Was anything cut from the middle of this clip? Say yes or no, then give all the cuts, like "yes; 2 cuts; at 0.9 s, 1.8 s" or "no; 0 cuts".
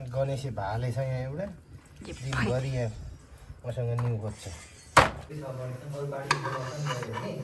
yes; 1 cut; at 5.5 s